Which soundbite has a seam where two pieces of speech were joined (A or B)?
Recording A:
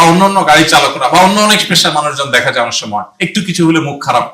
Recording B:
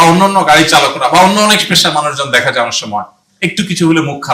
A